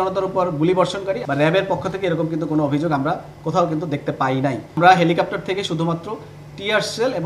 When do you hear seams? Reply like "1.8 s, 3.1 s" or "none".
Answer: 1.2 s, 4.8 s